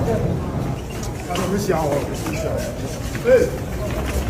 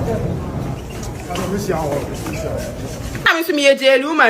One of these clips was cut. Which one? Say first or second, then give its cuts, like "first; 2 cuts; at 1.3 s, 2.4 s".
second; 1 cut; at 3.2 s